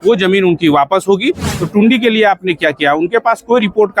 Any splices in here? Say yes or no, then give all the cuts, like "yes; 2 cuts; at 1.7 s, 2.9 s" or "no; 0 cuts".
yes; 1 cut; at 1.5 s